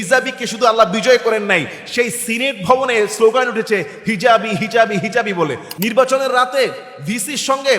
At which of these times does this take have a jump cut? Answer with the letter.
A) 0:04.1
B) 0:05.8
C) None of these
B